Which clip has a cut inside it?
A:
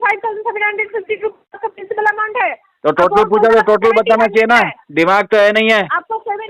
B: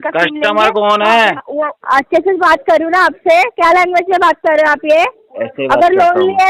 B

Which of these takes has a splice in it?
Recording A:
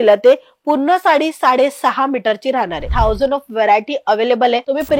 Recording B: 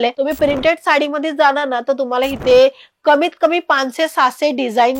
A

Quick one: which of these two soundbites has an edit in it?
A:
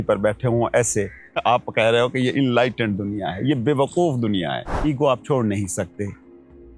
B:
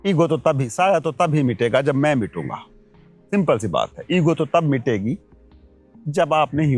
A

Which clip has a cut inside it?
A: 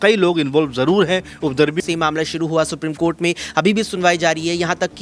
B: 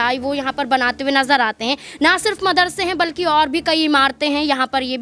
A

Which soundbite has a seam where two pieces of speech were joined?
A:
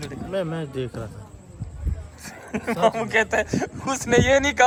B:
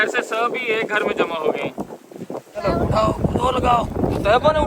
B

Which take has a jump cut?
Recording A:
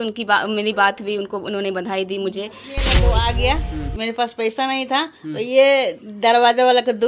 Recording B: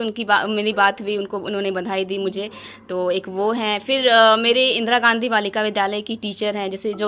A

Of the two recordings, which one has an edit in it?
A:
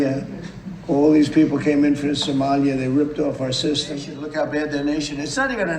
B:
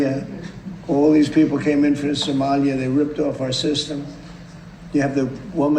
A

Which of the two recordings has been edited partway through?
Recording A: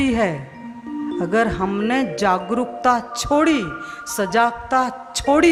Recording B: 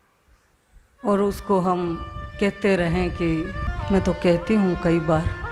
B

